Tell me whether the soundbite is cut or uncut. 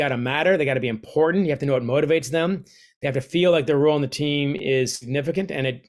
uncut